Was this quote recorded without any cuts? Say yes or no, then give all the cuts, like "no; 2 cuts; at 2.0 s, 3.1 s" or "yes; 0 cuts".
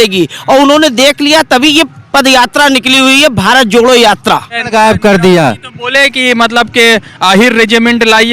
no; 1 cut; at 4.6 s